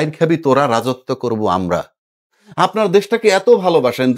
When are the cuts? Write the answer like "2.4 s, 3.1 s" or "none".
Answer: 2.3 s